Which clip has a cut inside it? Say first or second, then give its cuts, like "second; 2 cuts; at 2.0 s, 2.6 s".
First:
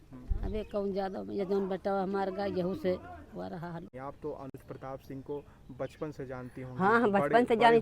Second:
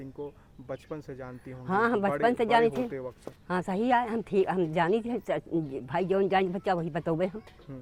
first; 1 cut; at 3.9 s